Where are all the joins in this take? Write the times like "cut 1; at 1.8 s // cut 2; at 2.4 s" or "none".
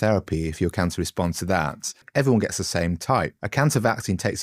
cut 1; at 2.0 s // cut 2; at 3.4 s